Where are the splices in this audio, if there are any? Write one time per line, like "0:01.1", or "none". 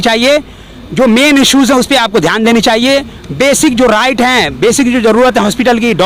none